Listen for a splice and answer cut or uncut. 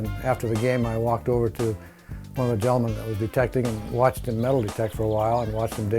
uncut